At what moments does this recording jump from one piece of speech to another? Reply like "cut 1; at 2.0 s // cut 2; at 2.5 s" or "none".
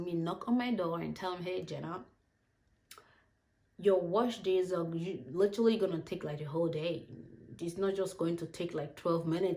none